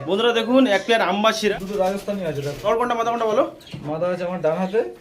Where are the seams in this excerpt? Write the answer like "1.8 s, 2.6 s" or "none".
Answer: 1.5 s, 2.6 s